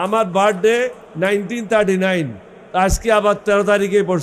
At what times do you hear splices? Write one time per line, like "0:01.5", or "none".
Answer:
0:01.0